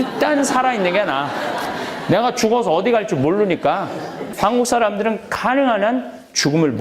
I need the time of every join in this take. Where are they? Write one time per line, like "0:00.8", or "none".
0:04.2